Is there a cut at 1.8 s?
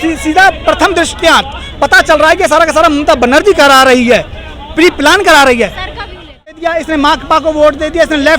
no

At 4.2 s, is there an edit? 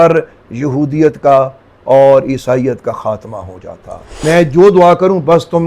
yes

